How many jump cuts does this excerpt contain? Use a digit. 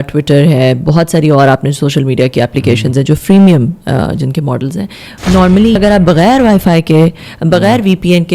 1